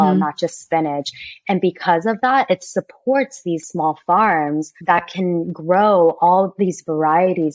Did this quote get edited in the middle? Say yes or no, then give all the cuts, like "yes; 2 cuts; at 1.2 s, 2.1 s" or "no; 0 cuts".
yes; 2 cuts; at 3.6 s, 4.8 s